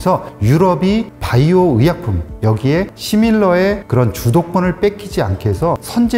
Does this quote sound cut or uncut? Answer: uncut